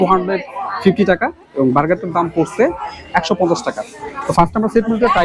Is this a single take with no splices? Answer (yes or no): yes